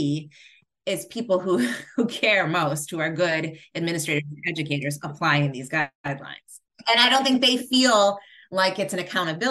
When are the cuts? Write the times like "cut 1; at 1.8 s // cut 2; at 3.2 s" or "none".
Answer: cut 1; at 6.4 s